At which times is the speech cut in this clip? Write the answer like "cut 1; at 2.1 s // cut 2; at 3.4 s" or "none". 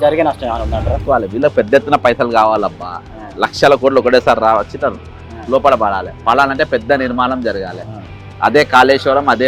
cut 1; at 1.0 s